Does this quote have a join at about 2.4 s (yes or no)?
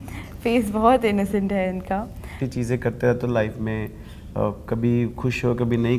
yes